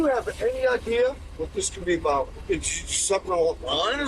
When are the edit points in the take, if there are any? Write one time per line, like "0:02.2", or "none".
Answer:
0:02.4